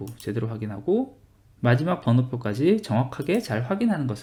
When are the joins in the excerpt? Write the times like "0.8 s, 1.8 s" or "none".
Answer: none